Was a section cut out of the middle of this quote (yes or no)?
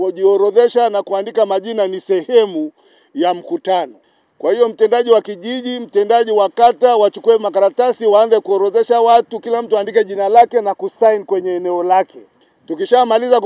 no